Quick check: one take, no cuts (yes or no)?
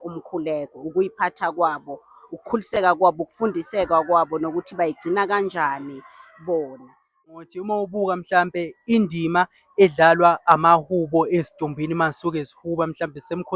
no